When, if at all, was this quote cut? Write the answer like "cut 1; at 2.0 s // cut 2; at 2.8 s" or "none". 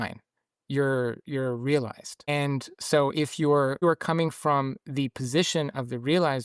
cut 1; at 2.3 s // cut 2; at 3.8 s